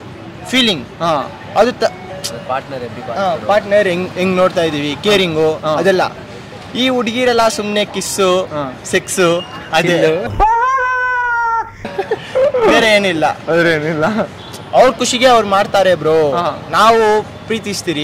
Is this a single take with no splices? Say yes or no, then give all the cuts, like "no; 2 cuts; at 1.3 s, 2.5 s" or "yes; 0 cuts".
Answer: yes; 0 cuts